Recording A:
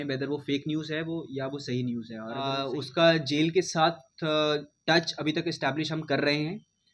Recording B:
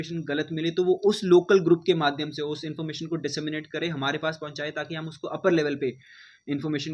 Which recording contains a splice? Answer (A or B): A